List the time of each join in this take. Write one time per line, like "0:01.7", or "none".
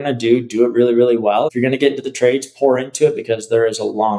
0:01.5